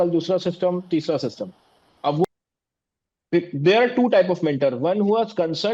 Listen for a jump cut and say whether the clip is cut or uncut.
cut